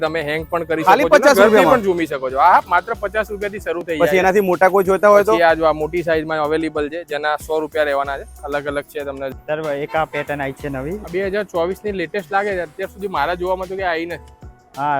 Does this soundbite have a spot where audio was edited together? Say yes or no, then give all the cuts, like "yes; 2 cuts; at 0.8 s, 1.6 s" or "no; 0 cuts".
yes; 1 cut; at 9.3 s